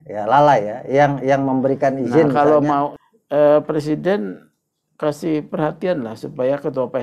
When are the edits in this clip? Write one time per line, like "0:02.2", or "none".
0:02.9